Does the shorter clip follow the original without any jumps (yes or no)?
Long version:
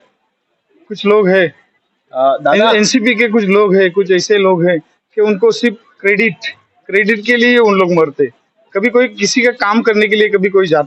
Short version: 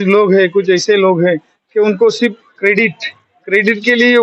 yes